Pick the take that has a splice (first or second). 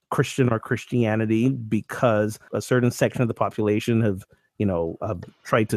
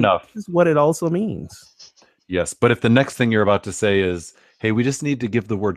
first